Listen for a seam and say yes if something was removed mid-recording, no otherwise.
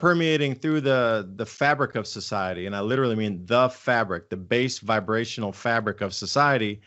no